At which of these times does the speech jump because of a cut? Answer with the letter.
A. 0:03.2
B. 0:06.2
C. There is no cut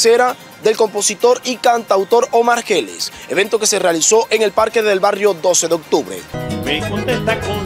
B